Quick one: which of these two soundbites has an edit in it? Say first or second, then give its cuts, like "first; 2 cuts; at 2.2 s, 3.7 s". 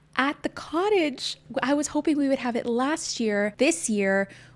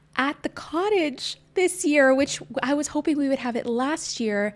first; 2 cuts; at 1.4 s, 3.5 s